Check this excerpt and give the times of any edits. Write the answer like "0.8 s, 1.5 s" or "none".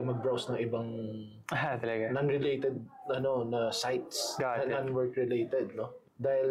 none